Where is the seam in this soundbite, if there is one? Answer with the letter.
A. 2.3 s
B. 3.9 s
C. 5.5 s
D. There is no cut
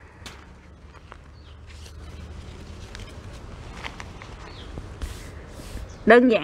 D